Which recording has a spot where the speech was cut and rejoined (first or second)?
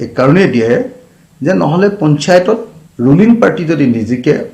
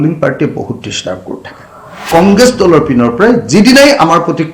second